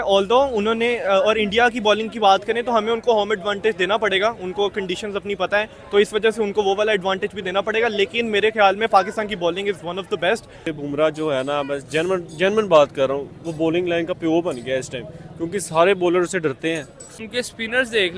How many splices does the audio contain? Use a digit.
2